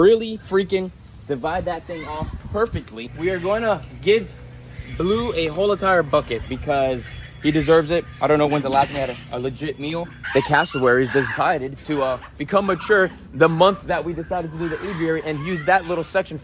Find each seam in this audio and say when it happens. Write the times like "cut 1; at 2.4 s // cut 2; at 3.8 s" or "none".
cut 1; at 3.0 s // cut 2; at 10.1 s